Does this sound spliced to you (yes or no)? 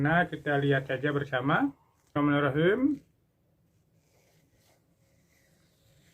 yes